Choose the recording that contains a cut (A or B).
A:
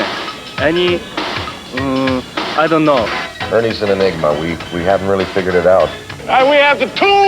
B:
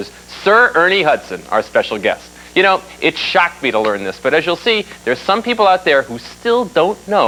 A